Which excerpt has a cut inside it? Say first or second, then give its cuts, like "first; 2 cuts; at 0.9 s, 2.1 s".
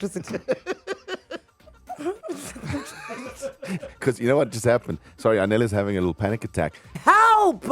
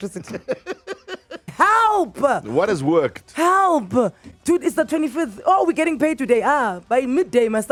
first; 2 cuts; at 1.4 s, 6.8 s